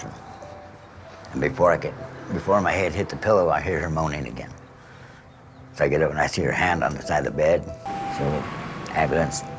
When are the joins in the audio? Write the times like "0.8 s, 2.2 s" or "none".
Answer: 7.8 s